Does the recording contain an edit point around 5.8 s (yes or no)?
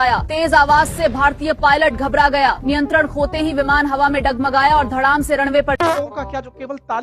yes